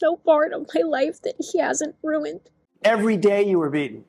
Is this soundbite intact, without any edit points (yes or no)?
no